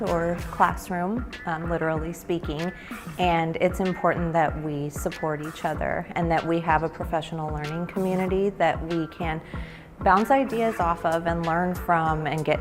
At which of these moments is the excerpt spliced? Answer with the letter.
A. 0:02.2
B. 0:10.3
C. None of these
C